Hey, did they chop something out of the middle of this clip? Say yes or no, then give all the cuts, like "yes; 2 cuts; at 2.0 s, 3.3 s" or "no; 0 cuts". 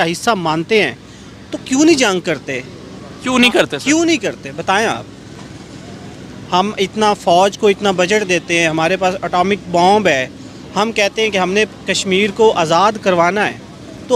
no; 0 cuts